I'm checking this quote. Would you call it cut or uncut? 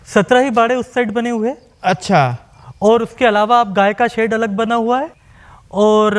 uncut